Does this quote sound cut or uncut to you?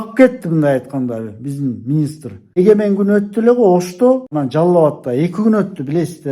cut